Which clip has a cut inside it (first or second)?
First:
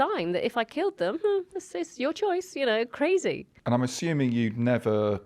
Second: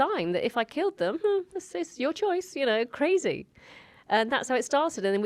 first